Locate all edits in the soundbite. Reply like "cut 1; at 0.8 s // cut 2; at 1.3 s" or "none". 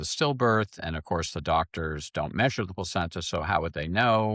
none